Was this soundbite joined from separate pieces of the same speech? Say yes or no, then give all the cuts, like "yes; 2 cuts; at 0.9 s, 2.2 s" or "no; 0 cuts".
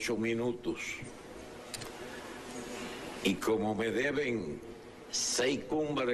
yes; 1 cut; at 2.8 s